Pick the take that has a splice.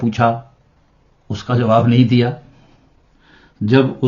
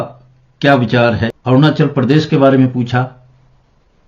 second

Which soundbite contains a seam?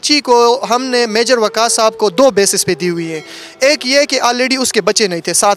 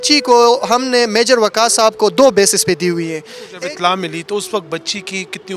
second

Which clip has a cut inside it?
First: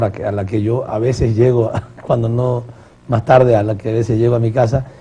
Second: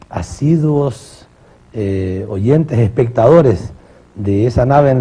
second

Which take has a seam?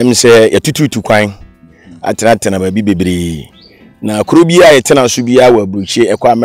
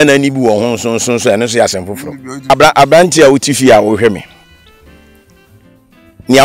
second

